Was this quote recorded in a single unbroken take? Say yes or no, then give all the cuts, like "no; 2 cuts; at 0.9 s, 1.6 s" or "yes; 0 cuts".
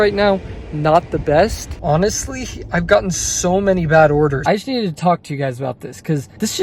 no; 2 cuts; at 1.7 s, 4.4 s